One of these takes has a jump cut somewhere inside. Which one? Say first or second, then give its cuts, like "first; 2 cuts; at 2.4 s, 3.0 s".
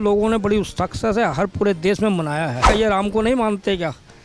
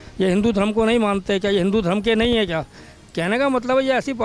first; 1 cut; at 2.7 s